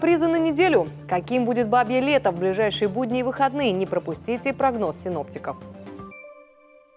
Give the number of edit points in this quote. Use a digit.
1